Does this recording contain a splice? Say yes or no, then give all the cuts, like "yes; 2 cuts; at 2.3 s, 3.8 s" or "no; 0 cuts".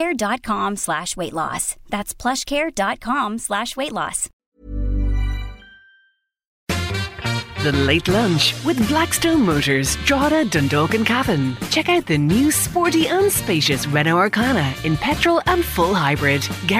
yes; 2 cuts; at 4.4 s, 6.7 s